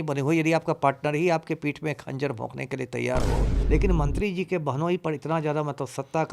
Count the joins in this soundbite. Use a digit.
1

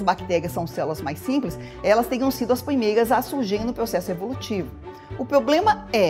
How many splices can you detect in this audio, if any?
0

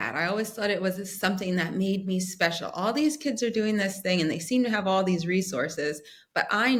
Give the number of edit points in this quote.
0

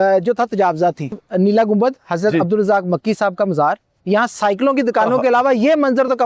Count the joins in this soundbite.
2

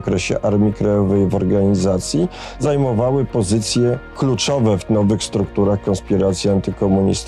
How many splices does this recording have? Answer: 2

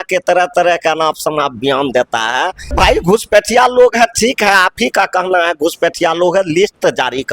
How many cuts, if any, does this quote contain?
1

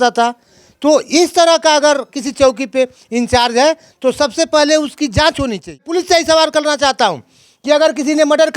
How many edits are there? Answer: 1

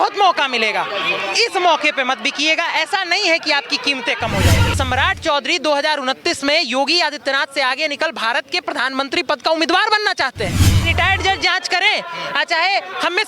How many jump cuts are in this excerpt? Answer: 2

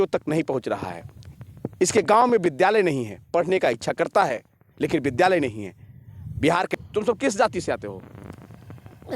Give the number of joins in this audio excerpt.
1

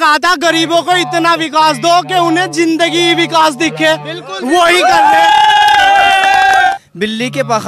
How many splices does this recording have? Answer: 1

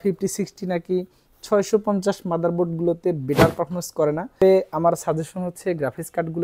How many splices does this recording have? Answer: 1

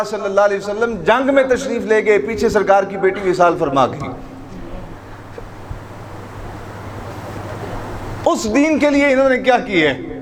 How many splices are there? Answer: 0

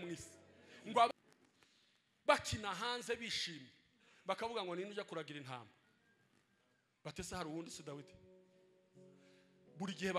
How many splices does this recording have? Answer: 1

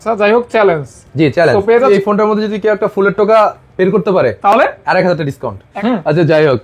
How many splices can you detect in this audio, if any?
2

